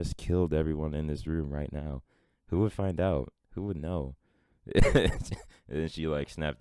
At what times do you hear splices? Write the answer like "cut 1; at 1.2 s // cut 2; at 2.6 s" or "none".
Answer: none